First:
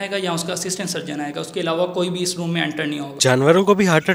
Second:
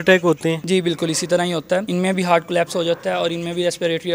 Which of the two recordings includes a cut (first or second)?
first